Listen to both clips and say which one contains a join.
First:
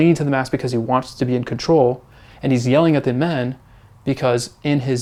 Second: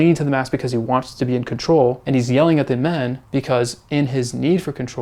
second; 2 cuts; at 2.0 s, 3.2 s

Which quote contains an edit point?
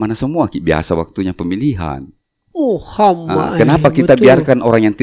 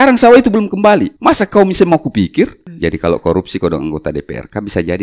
second; 2 cuts; at 1.1 s, 2.6 s

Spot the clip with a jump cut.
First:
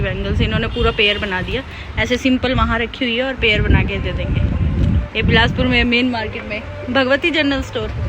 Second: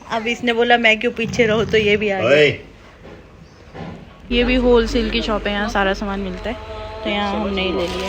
second; 1 cut; at 4.2 s

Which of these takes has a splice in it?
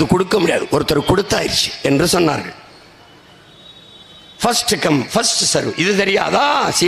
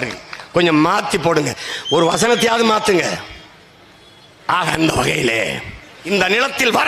second; 1 cut; at 5.9 s

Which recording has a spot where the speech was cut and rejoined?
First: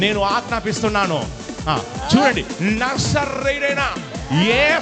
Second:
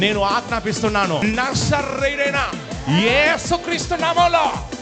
second; 1 cut; at 1.2 s

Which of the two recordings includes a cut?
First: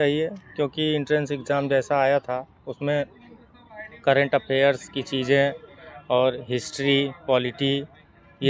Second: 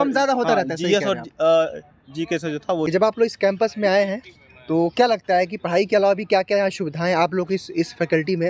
second; 1 cut; at 2.9 s

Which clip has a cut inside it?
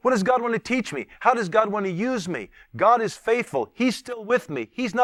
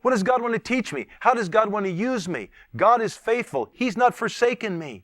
second; 1 cut; at 3.7 s

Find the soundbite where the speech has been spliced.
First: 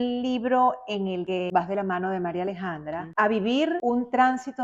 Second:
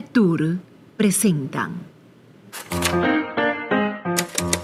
first; 3 cuts; at 1.3 s, 3.0 s, 3.8 s

